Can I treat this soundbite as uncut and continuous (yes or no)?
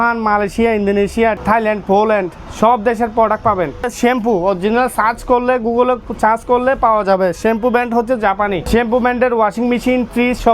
no